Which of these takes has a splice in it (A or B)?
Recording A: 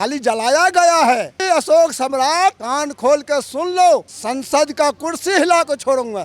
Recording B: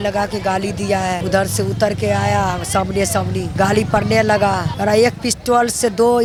A